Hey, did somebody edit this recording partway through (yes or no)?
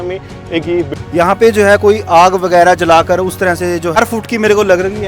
yes